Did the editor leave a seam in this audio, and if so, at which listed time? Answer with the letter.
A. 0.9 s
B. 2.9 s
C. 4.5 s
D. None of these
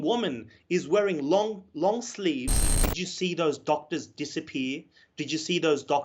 B